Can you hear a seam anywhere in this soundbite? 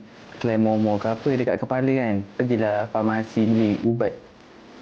yes; 1 cut; at 2.3 s

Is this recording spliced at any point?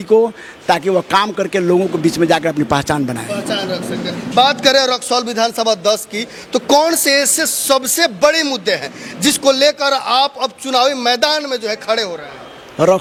no; 0 cuts

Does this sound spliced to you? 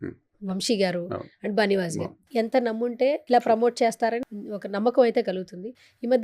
yes; 3 cuts; at 2.2 s, 3.2 s, 4.2 s

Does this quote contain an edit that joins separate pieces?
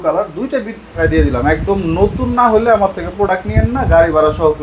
yes; 1 cut; at 1.0 s

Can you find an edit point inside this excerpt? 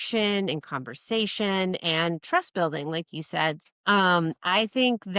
yes; 1 cut; at 3.6 s

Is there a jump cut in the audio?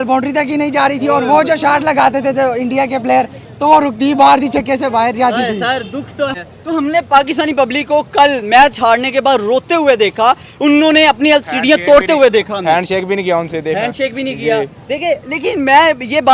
no; 0 cuts

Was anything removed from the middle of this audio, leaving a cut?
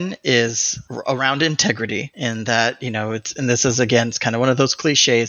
yes; 1 cut; at 3.3 s

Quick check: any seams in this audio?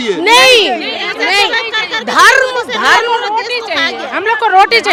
no; 0 cuts

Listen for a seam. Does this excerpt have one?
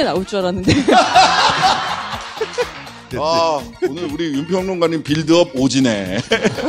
no; 0 cuts

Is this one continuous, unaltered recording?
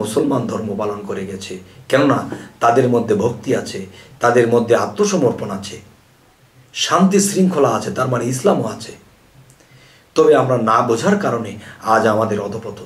yes; 0 cuts

